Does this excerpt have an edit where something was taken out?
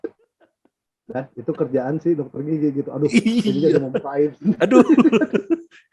no; 0 cuts

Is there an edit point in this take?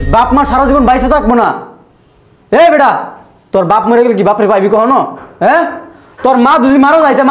no; 0 cuts

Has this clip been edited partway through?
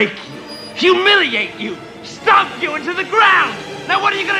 no; 0 cuts

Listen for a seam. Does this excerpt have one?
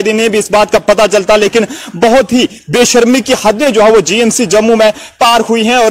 no; 0 cuts

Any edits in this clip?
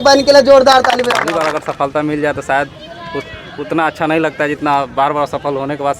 yes; 1 cut; at 1.3 s

